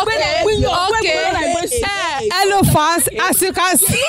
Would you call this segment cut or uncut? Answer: uncut